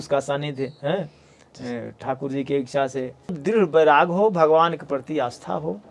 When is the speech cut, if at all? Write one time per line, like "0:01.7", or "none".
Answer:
0:03.4